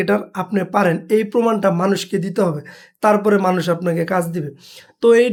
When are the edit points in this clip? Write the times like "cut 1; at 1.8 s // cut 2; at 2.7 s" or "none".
none